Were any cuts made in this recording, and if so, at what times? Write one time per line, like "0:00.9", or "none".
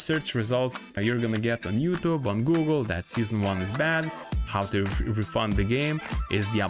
0:01.0

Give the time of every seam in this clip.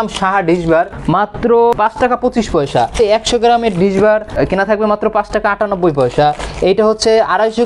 0:01.0
0:01.7
0:02.9
0:04.3

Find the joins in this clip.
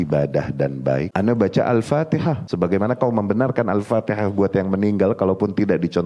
0:01.1
0:02.4

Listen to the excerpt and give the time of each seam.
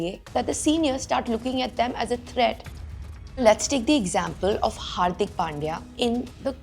0:02.7

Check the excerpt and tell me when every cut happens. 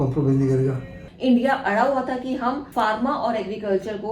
0:01.0
0:02.6

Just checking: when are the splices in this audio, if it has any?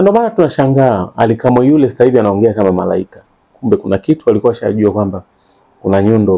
none

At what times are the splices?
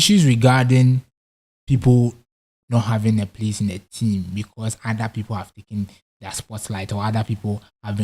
none

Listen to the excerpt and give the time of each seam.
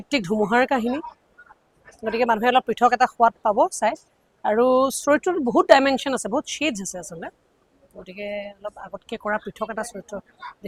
none

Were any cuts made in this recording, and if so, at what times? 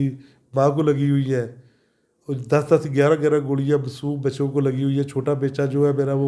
none

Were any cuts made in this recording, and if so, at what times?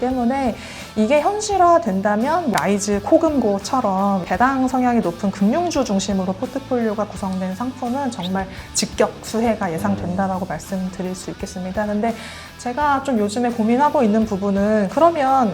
0:02.5
0:04.2

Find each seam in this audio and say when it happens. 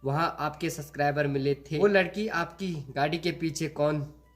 0:01.7

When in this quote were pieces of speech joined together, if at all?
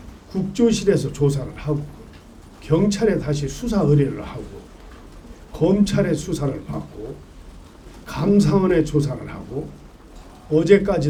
none

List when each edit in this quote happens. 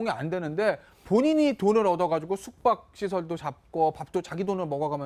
0:01.3

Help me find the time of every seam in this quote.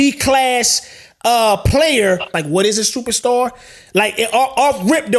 0:02.4

